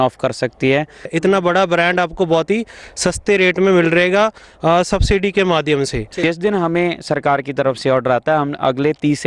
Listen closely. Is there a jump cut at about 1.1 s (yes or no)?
yes